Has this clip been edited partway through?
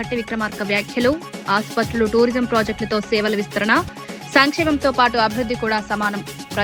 no; 0 cuts

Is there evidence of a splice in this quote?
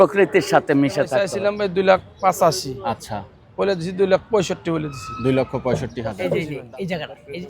yes; 2 cuts; at 1.2 s, 6.2 s

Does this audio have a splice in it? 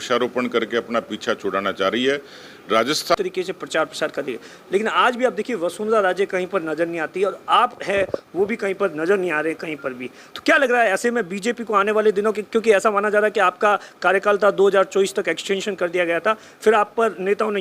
yes; 1 cut; at 3.2 s

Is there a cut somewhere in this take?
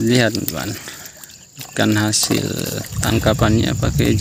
no; 0 cuts

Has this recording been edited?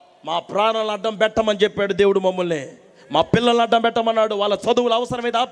no; 0 cuts

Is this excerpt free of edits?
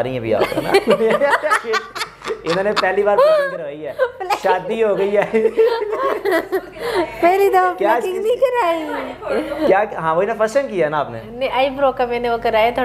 yes; 0 cuts

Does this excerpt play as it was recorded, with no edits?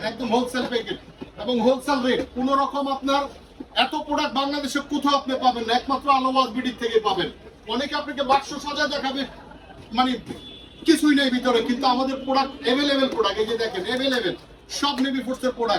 yes; 0 cuts

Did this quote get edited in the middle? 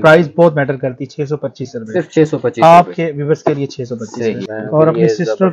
yes; 1 cut; at 4.5 s

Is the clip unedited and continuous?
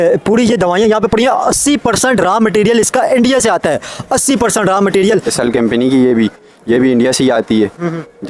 no; 1 cut; at 5.3 s

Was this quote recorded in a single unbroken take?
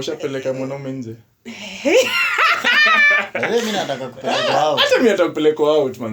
yes; 0 cuts

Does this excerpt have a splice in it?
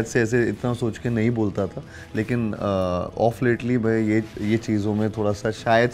no; 0 cuts

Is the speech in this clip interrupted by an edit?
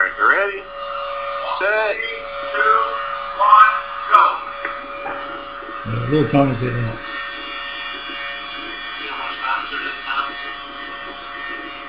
no; 0 cuts

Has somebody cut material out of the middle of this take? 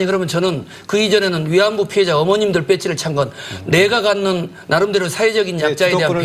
no; 0 cuts

